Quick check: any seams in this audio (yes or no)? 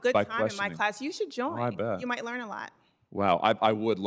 no